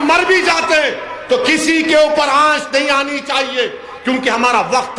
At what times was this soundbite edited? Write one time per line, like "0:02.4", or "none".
none